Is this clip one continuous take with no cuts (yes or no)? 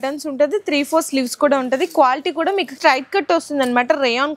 no